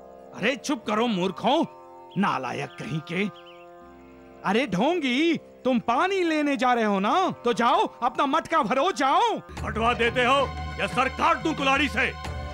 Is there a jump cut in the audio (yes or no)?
yes